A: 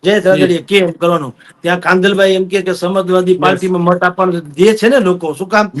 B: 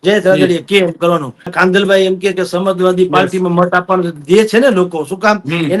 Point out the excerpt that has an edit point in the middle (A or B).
B